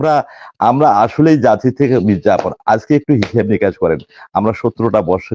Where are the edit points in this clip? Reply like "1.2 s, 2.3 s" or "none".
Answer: none